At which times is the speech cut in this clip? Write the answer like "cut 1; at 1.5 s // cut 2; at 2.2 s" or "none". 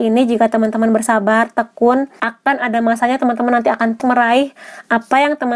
cut 1; at 2.2 s // cut 2; at 4.0 s